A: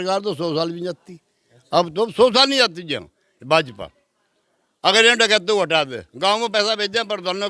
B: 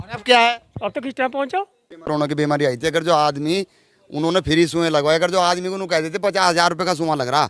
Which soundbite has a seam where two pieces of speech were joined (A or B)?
B